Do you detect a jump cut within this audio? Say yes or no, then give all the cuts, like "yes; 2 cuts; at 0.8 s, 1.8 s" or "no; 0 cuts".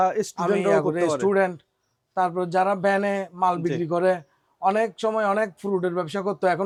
no; 0 cuts